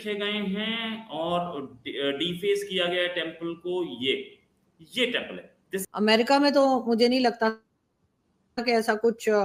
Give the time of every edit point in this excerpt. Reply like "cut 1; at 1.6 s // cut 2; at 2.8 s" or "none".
none